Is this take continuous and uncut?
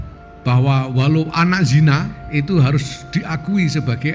no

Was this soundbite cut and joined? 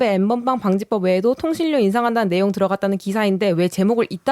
no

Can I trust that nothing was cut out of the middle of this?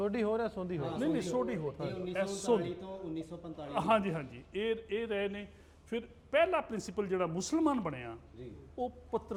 yes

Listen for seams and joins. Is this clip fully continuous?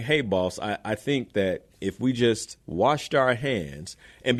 yes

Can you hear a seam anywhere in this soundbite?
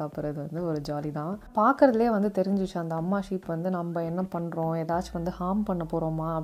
yes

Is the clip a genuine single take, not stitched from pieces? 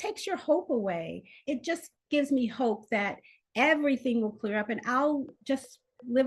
no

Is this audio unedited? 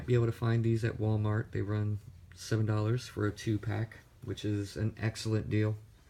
no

